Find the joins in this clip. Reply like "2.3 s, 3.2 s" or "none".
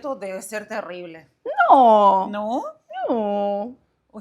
none